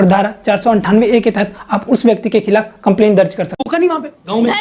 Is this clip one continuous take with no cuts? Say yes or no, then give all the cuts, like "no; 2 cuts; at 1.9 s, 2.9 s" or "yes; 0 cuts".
no; 1 cut; at 3.7 s